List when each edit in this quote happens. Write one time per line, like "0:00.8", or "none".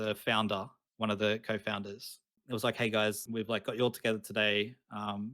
0:02.4
0:03.2